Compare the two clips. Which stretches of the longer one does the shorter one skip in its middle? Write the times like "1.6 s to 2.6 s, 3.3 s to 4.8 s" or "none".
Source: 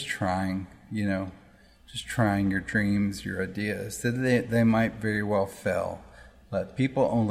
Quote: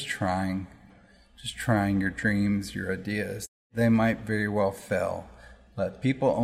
0.8 s to 1.3 s, 4.2 s to 4.4 s

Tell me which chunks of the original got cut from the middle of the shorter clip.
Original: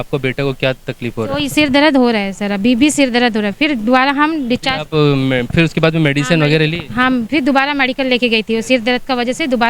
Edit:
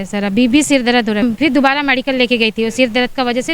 3.5 s to 7.1 s

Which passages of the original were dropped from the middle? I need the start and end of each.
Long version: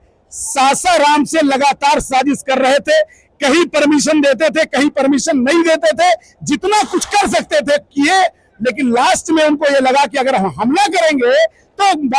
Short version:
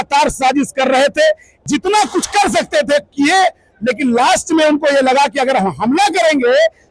3.2 s to 6.3 s

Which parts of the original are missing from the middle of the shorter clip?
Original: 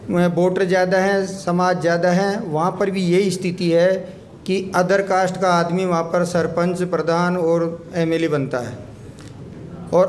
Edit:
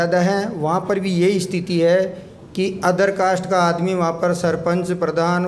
none

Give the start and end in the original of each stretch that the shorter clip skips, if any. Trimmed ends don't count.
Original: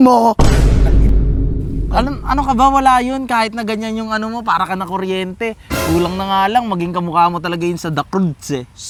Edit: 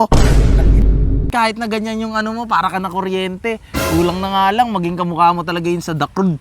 1.6 s to 3.3 s

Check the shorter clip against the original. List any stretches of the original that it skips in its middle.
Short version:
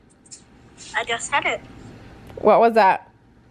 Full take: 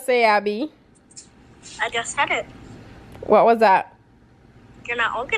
none

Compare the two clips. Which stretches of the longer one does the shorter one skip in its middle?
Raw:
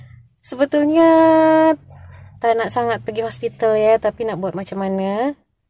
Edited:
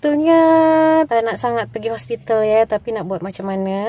1.8 s to 2.4 s

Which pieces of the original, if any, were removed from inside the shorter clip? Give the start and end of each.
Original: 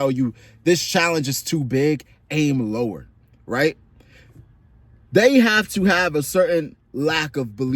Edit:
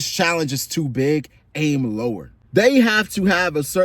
3.1 s to 4.9 s

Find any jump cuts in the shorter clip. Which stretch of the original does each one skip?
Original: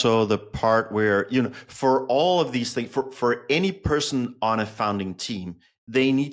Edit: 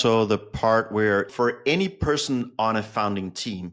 1.3 s to 3.1 s

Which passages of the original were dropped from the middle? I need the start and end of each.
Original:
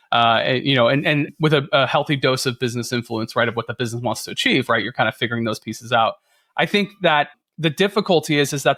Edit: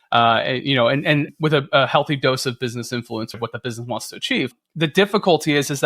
3.3 s to 3.5 s, 4.7 s to 7.4 s

